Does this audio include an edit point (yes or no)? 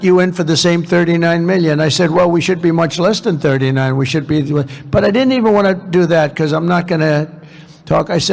no